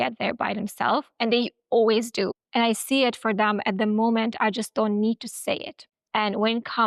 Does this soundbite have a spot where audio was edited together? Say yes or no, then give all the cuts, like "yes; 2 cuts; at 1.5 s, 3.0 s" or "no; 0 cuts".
yes; 1 cut; at 6.0 s